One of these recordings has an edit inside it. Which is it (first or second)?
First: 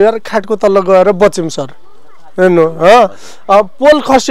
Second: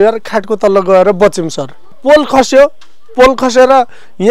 second